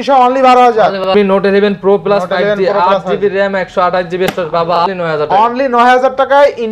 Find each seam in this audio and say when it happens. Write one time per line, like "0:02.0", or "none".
0:01.0
0:04.8